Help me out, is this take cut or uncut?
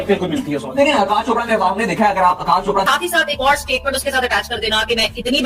cut